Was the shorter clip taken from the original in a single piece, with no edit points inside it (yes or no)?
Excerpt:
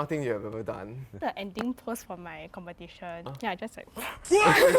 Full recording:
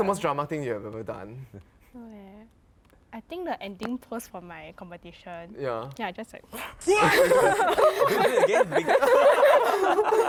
no